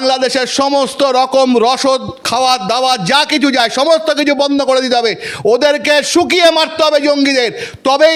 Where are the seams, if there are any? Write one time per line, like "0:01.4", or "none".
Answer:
none